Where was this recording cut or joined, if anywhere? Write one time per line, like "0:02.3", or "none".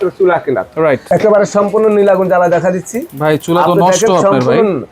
0:01.0